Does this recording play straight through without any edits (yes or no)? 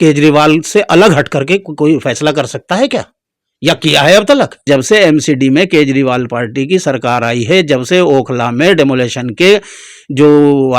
no